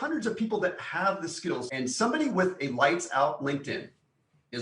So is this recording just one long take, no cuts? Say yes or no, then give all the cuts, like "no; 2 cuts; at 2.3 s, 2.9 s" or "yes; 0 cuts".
no; 1 cut; at 1.7 s